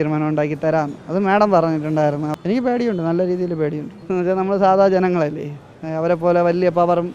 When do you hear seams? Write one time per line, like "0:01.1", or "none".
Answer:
0:01.0
0:02.3
0:03.9